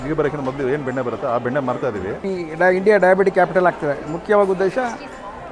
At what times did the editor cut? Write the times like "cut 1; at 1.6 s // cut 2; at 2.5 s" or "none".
cut 1; at 2.2 s